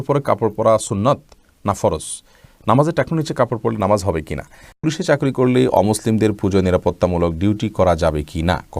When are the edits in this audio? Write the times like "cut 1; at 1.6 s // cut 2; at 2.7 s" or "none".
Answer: cut 1; at 4.8 s

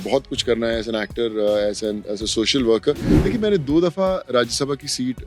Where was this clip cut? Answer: cut 1; at 3.1 s

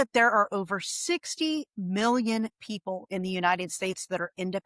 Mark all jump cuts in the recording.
none

